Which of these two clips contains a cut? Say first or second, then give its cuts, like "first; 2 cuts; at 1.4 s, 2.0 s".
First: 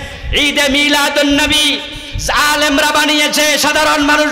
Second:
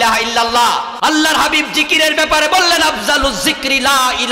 second; 1 cut; at 0.9 s